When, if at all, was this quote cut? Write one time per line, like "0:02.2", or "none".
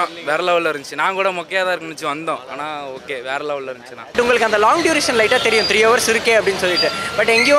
0:04.1